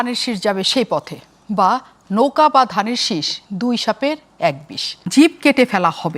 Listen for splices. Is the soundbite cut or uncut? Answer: cut